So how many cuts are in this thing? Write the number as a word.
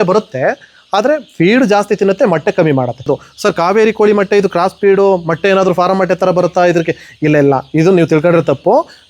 one